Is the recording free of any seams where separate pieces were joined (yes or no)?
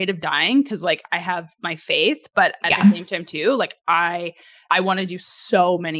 no